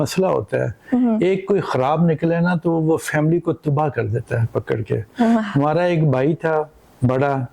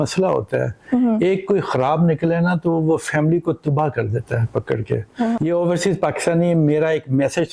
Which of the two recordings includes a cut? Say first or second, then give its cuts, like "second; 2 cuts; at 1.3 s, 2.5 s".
second; 1 cut; at 5.3 s